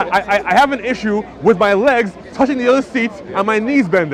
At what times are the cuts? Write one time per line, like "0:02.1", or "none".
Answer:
none